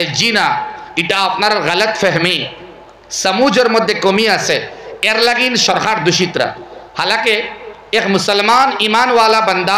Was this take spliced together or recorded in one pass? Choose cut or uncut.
uncut